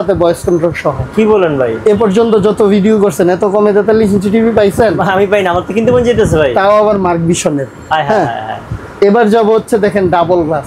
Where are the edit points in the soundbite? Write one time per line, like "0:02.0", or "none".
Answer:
none